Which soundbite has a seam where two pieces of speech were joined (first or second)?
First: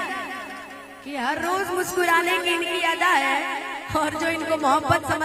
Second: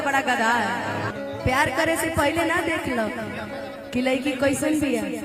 second